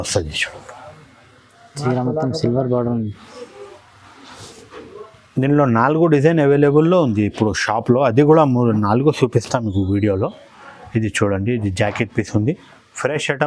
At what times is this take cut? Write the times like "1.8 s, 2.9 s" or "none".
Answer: none